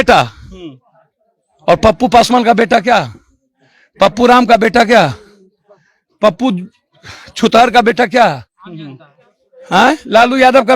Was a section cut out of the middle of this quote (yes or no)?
no